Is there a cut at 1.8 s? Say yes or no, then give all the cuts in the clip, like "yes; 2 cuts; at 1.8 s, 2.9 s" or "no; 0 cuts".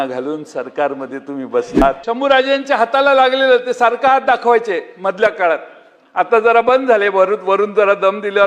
yes; 1 cut; at 1.8 s